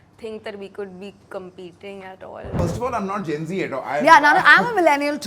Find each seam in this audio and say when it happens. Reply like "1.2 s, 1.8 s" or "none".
2.5 s